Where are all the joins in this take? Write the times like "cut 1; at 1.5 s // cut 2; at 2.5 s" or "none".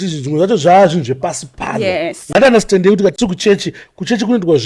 none